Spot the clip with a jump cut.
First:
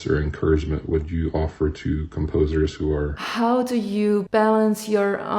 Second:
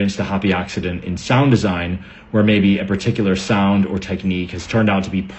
first; 2 cuts; at 3.2 s, 4.3 s

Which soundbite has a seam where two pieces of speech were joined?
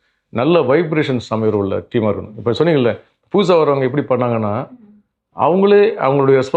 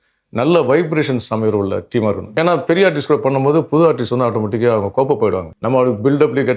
second; 2 cuts; at 2.3 s, 5.5 s

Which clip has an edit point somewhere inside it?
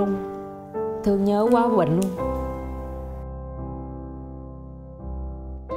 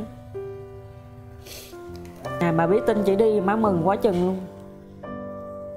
second; 1 cut; at 1.8 s

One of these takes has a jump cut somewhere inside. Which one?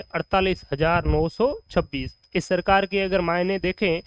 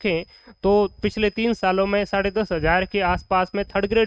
first; 1 cut; at 2.2 s

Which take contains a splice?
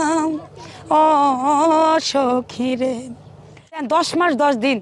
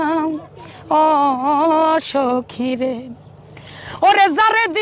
first; 1 cut; at 3.8 s

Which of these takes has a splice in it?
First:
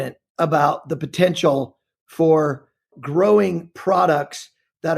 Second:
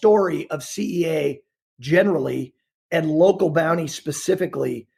first; 1 cut; at 2.9 s

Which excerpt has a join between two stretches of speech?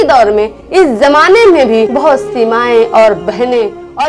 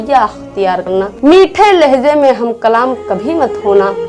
second; 1 cut; at 1.0 s

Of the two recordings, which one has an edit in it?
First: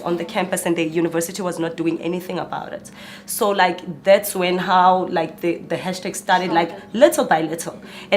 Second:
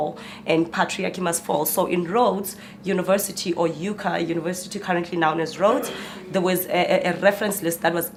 first; 1 cut; at 6.8 s

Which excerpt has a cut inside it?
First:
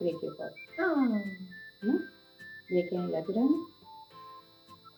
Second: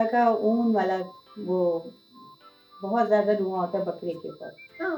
first; 1 cut; at 3.6 s

